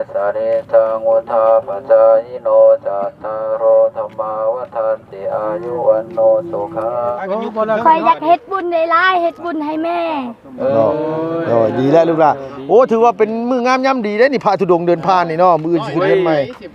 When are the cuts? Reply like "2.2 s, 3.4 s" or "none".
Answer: 7.2 s